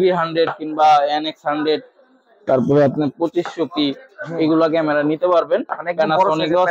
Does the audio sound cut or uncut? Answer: uncut